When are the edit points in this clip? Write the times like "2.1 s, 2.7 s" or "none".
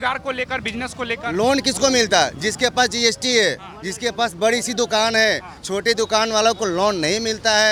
none